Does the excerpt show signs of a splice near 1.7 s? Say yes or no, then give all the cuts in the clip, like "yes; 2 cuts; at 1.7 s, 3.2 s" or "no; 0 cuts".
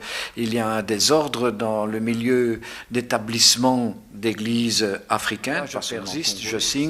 no; 1 cut; at 5.9 s